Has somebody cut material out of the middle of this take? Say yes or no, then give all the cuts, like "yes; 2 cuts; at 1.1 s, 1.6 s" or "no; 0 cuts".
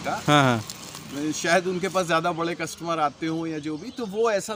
no; 0 cuts